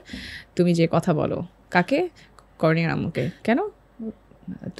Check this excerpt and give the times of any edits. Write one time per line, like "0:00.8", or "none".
none

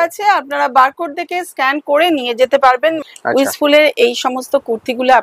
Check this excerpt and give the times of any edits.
0:03.0

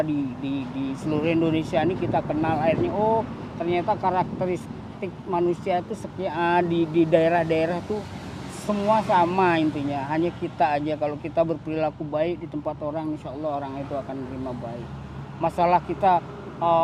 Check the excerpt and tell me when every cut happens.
none

